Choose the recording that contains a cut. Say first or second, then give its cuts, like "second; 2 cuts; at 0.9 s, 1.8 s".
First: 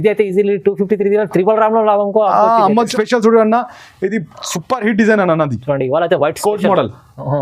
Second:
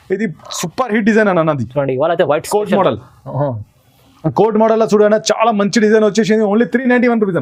first; 1 cut; at 2.9 s